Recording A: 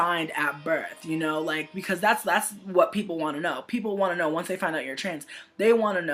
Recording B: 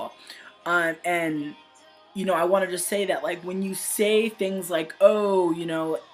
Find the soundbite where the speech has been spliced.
A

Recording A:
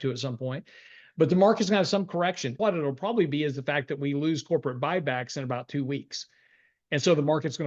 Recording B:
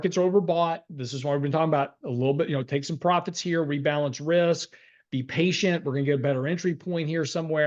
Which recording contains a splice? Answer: A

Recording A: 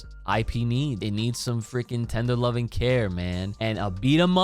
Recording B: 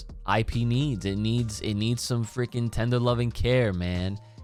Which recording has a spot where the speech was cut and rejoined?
A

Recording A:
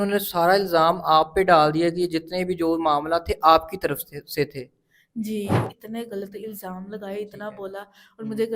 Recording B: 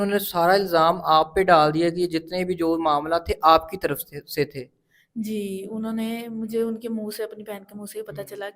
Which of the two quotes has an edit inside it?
A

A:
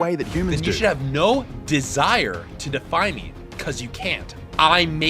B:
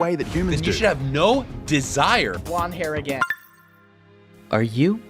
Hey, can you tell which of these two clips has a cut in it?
B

